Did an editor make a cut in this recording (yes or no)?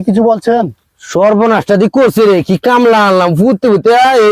no